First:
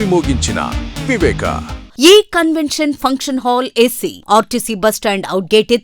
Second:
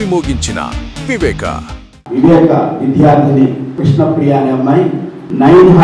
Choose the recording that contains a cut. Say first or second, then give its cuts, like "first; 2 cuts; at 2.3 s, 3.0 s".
first; 1 cut; at 1.8 s